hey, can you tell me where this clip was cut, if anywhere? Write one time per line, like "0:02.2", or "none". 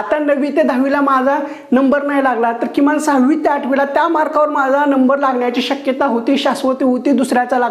none